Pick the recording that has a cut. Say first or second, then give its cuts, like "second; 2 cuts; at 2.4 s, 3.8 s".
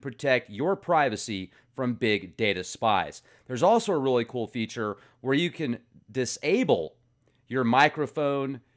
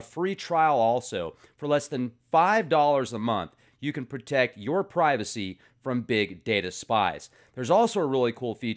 second; 1 cut; at 3.0 s